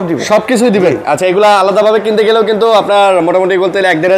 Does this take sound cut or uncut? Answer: uncut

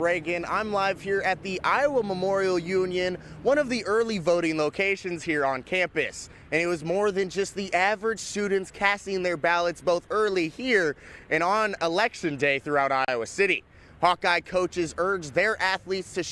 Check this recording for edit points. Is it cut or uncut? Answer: uncut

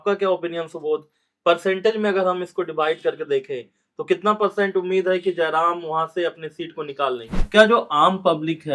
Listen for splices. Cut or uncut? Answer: cut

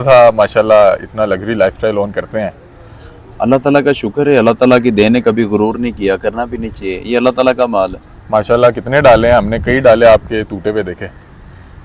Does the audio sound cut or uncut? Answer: uncut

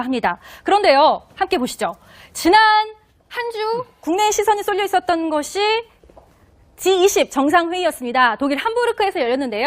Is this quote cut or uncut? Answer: cut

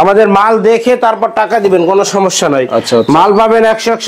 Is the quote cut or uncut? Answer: uncut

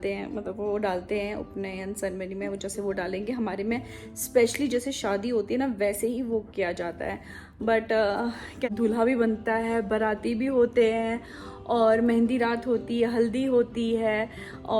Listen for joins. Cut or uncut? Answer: cut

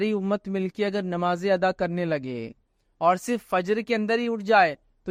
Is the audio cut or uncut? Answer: uncut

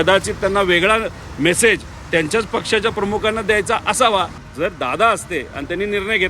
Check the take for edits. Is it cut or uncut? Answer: cut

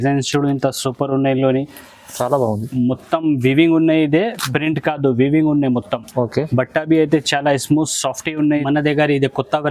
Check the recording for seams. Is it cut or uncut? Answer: cut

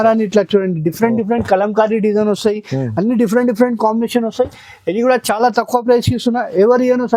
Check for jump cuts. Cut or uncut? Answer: uncut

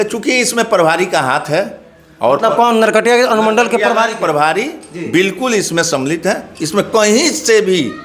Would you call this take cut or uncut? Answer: uncut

